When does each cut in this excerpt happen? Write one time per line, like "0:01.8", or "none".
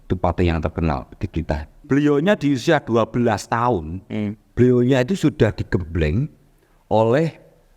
0:01.8